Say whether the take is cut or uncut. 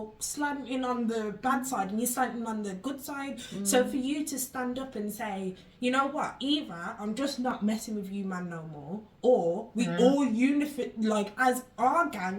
uncut